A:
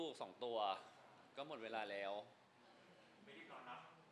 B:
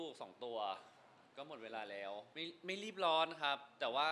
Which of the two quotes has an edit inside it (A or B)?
B